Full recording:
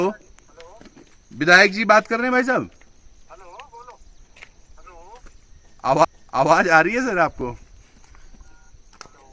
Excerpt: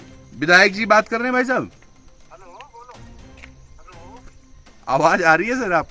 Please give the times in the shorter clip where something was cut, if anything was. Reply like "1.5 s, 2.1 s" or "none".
4.7 s